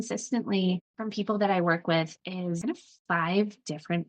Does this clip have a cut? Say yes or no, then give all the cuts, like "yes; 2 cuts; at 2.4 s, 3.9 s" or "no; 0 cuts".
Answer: yes; 2 cuts; at 1.0 s, 2.6 s